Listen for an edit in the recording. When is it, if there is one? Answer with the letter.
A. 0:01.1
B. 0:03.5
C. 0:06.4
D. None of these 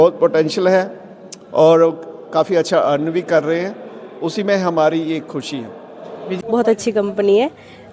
C